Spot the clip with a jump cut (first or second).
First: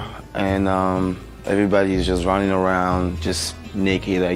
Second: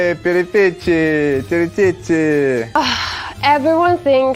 second